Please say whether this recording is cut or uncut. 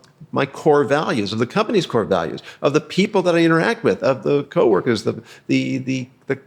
uncut